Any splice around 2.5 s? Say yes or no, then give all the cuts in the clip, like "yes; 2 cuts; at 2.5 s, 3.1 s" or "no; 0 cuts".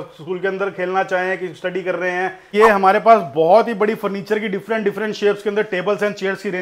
yes; 1 cut; at 2.5 s